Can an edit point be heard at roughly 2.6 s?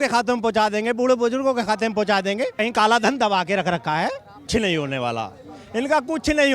yes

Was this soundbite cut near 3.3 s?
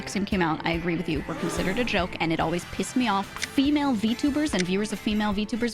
yes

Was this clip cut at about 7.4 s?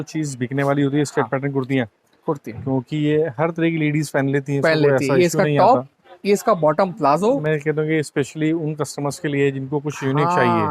yes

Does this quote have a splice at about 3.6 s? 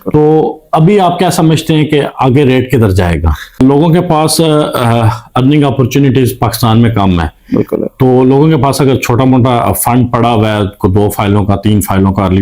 yes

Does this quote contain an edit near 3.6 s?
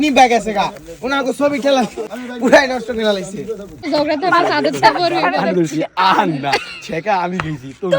yes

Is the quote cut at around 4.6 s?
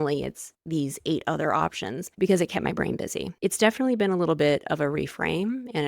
no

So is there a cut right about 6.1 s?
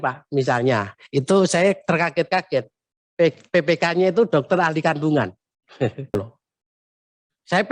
yes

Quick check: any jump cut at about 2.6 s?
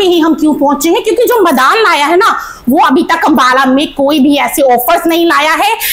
no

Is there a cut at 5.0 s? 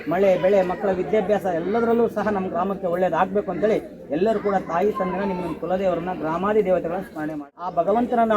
no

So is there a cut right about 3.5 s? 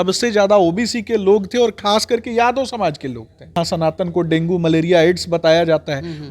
yes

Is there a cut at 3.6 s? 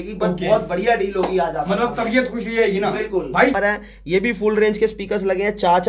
yes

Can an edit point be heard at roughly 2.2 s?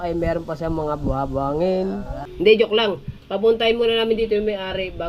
yes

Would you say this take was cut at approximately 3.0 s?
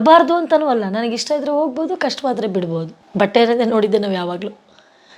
yes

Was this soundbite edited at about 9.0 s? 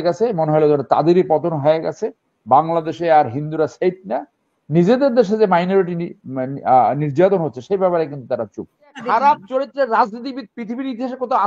yes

